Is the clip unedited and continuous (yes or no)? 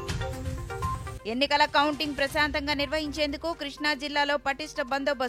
yes